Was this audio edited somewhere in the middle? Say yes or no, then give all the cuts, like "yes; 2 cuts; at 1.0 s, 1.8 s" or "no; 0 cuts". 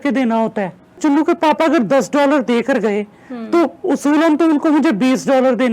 yes; 1 cut; at 1.0 s